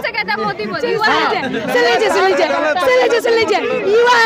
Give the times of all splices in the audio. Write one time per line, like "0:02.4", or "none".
none